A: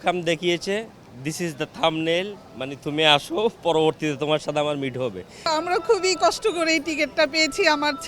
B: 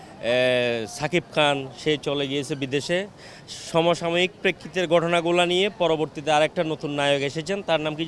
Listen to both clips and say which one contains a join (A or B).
A